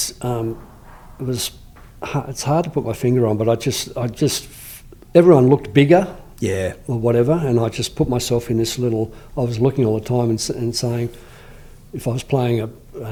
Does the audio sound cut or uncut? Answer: uncut